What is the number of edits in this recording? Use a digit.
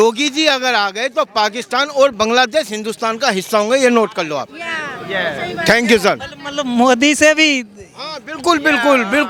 0